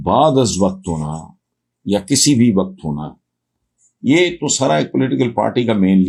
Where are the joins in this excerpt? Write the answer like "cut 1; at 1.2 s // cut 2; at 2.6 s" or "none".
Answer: none